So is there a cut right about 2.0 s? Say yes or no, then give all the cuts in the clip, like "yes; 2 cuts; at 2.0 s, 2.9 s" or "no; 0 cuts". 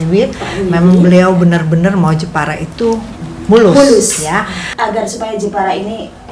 no; 1 cut; at 4.6 s